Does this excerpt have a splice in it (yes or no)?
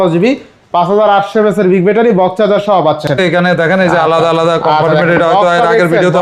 yes